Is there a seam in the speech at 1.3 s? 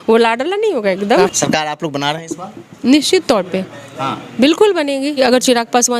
yes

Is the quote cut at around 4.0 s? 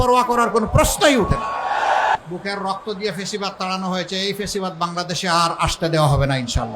no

